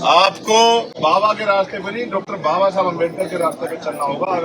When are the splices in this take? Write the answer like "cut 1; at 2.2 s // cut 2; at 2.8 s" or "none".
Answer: cut 1; at 0.9 s